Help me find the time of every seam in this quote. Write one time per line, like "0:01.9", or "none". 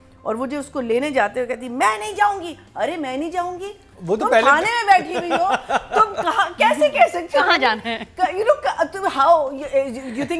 none